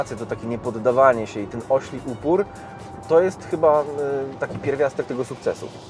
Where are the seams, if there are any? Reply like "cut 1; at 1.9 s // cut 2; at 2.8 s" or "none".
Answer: none